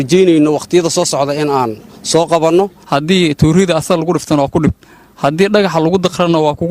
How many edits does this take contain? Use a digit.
1